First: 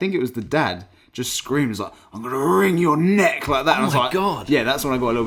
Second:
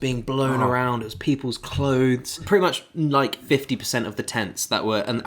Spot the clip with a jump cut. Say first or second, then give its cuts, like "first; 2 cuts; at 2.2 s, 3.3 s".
second; 2 cuts; at 2.4 s, 3.4 s